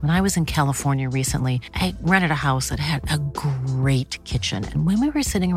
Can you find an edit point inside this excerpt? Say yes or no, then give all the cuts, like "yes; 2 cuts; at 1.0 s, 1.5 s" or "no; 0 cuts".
no; 0 cuts